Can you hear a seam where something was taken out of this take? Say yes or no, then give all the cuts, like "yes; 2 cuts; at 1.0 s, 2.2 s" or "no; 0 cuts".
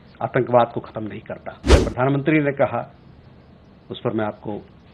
yes; 1 cut; at 1.7 s